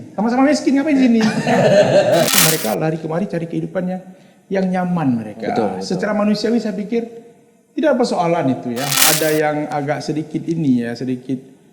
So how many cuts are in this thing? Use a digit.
2